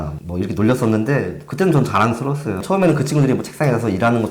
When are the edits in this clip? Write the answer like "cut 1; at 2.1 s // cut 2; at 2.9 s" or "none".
cut 1; at 2.5 s